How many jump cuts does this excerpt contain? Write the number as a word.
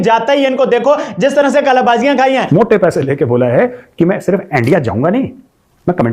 one